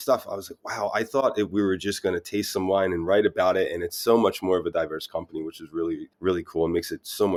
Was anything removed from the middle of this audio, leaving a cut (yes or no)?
no